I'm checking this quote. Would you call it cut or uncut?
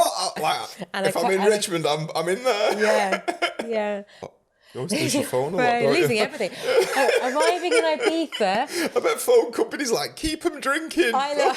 cut